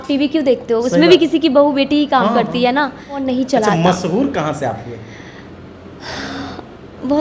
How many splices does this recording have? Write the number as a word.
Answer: one